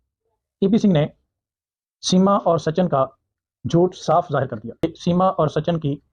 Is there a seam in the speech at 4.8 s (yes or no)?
yes